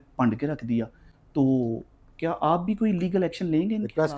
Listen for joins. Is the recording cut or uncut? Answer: uncut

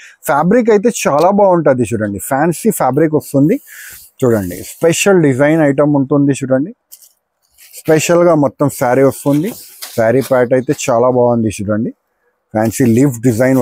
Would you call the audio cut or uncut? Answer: uncut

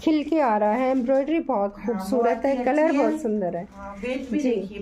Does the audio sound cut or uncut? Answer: uncut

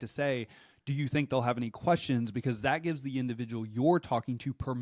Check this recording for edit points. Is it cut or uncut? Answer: uncut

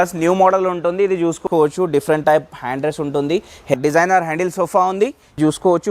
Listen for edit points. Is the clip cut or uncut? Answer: cut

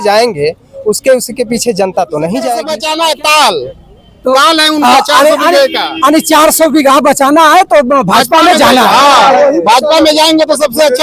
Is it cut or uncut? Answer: cut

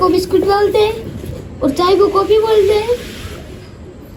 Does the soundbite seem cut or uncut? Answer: uncut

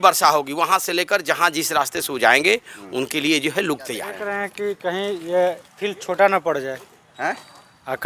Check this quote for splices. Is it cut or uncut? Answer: cut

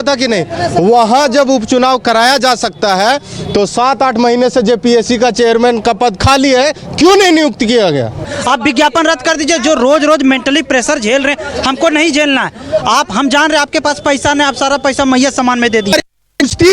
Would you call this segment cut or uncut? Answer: cut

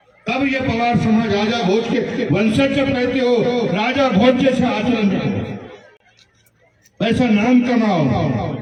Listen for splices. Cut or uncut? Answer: uncut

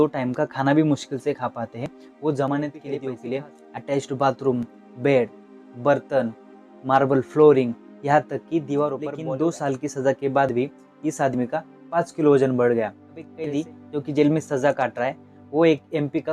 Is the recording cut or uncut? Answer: cut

